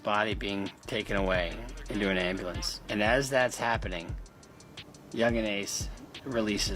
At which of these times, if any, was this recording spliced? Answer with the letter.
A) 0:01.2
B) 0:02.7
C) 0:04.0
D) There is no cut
B